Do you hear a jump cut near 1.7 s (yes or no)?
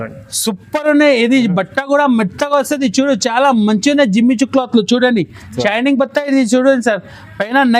no